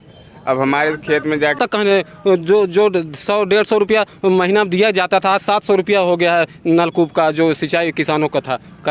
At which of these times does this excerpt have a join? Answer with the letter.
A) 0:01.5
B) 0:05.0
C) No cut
A